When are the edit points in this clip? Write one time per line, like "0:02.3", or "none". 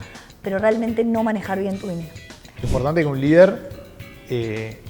0:02.6